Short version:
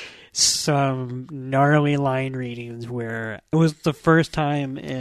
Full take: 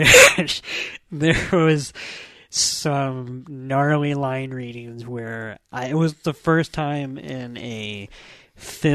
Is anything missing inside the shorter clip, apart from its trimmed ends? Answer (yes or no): yes